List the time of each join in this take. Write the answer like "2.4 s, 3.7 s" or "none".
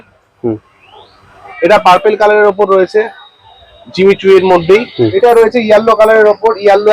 1.5 s, 5.1 s